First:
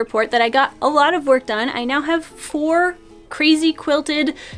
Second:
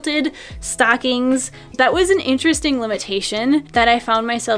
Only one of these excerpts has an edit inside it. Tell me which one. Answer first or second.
second